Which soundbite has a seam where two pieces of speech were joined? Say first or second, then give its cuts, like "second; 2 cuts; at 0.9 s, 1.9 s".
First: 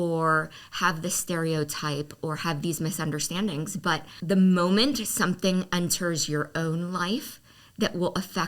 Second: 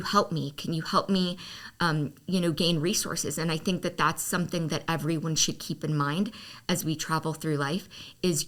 first; 1 cut; at 4.1 s